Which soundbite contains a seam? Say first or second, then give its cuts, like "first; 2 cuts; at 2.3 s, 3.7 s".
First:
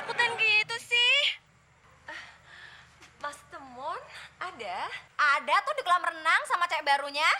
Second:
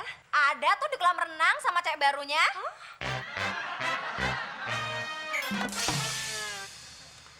first; 1 cut; at 1.4 s